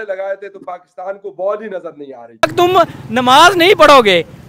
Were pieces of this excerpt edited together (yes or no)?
yes